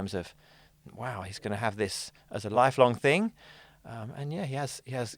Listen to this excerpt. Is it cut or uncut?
cut